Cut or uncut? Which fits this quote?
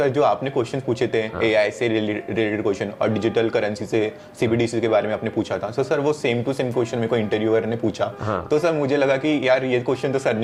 uncut